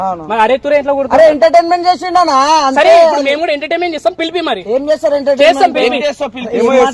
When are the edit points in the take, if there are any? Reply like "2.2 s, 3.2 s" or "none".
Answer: none